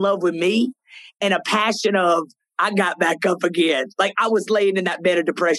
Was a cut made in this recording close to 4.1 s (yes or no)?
yes